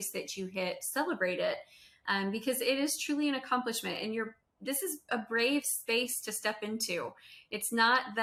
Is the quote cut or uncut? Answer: uncut